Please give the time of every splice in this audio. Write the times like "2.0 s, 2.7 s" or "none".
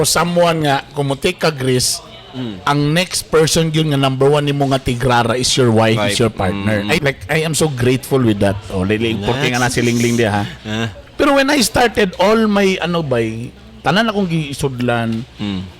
7.0 s